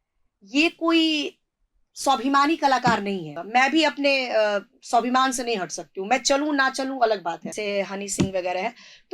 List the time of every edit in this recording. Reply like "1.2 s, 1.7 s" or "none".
3.3 s, 7.5 s